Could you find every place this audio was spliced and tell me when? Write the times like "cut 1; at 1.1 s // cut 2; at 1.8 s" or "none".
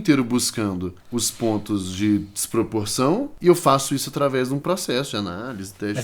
cut 1; at 0.9 s // cut 2; at 3.3 s